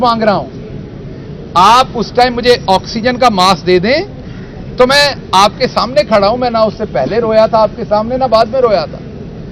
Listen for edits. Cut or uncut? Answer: uncut